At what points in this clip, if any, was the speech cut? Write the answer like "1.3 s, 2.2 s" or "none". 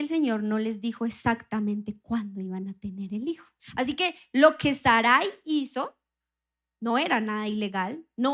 3.6 s